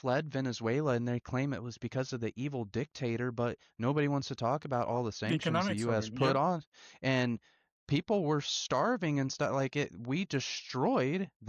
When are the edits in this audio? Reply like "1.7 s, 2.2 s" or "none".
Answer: none